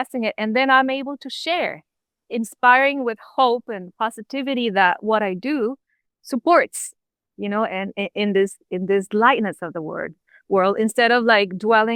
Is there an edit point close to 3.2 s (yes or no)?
no